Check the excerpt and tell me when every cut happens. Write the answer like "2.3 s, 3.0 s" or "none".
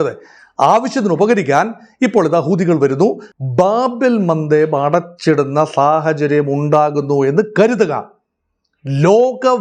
3.3 s

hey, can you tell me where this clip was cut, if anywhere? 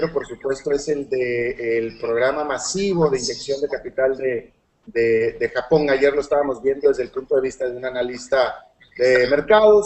none

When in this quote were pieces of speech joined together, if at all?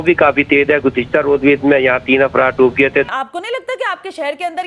3.1 s

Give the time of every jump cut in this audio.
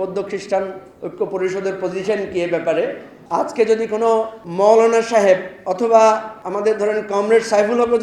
3.1 s, 4.4 s, 5.6 s, 6.4 s

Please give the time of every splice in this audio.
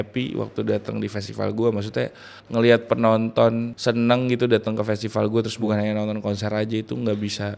2.4 s, 3.7 s, 5.6 s

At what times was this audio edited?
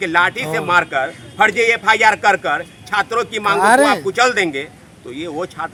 none

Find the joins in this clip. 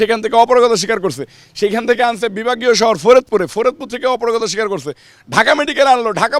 none

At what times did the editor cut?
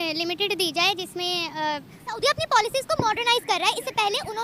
2.0 s

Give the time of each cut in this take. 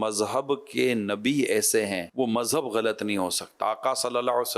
2.1 s, 3.5 s

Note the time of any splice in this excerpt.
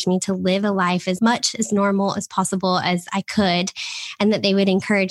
1.2 s

